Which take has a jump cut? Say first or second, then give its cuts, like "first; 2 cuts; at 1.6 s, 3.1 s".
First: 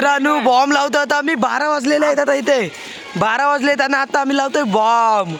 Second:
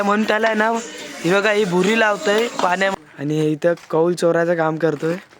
second; 1 cut; at 2.9 s